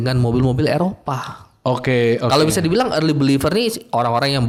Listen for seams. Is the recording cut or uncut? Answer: uncut